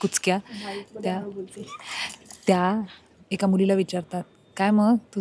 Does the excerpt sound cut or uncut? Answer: uncut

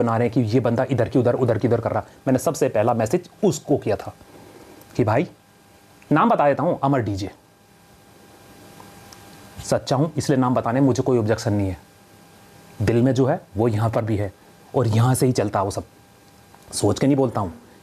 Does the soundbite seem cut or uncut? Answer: uncut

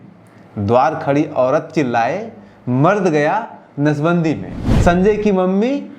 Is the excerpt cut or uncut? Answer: cut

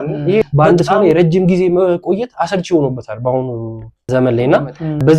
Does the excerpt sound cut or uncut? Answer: uncut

